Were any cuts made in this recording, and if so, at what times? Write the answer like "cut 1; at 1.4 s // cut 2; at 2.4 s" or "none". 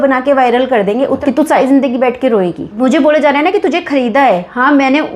cut 1; at 1.2 s // cut 2; at 2.7 s